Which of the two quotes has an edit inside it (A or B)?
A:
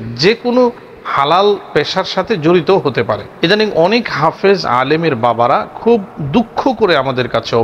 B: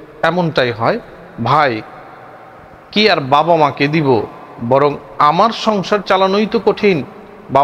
A